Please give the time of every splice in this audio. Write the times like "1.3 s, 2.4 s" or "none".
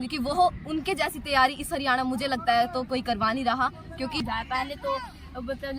4.2 s